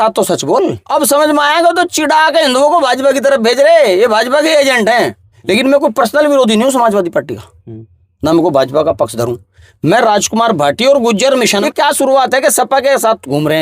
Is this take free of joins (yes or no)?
no